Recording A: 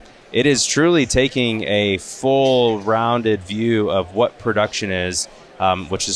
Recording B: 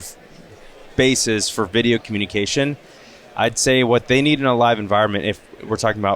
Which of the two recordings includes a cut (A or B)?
B